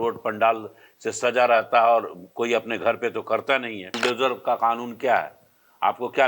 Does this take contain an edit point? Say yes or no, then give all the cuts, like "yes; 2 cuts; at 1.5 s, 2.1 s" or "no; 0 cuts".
yes; 1 cut; at 3.9 s